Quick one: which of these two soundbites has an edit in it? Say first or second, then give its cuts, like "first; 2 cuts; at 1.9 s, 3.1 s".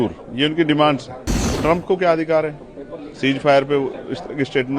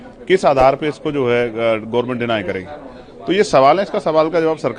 first; 1 cut; at 1.5 s